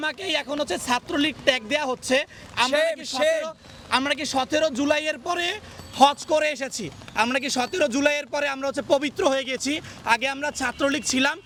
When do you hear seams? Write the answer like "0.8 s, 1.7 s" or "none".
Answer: none